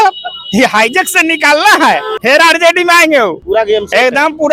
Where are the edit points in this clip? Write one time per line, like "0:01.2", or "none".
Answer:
0:02.1
0:03.4